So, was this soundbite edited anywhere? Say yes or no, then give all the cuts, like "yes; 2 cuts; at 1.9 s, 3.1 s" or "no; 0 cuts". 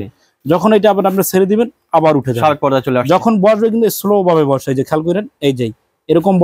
no; 0 cuts